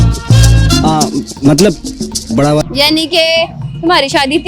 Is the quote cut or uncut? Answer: cut